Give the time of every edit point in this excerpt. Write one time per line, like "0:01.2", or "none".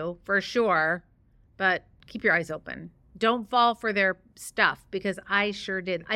0:02.0